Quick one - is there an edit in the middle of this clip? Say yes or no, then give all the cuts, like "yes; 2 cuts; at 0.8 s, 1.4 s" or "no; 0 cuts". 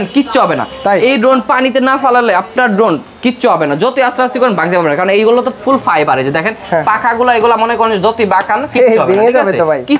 no; 0 cuts